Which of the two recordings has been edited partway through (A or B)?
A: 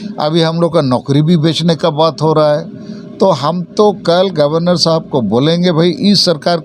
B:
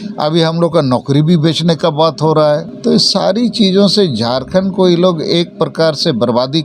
B